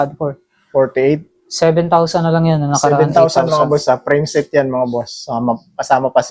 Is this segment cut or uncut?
uncut